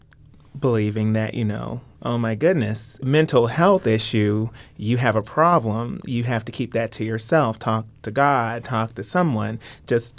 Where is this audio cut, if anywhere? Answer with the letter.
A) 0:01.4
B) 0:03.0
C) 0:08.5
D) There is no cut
B